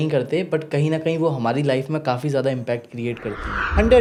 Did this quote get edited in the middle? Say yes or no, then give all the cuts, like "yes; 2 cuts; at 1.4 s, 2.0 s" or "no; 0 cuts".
no; 0 cuts